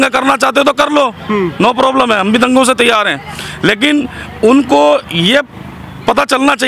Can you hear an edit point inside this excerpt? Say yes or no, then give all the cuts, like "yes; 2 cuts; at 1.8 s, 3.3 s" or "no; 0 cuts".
no; 0 cuts